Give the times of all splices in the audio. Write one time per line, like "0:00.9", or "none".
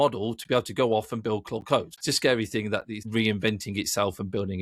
0:01.9
0:03.0